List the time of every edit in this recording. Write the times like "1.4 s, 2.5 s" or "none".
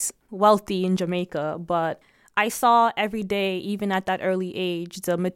2.0 s